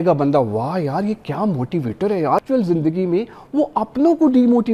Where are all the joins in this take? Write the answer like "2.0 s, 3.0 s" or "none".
2.4 s